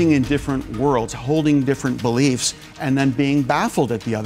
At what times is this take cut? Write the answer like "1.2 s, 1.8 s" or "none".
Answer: none